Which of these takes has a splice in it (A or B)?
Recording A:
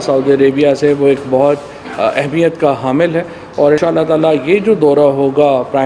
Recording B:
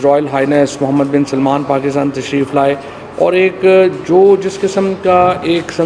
A